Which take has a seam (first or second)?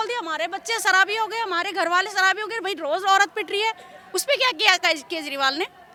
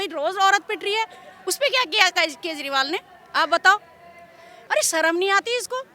second